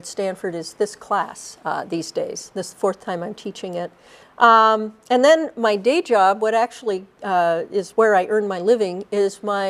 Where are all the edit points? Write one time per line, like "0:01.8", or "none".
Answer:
0:08.0